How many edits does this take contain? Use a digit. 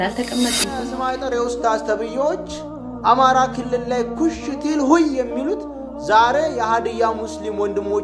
1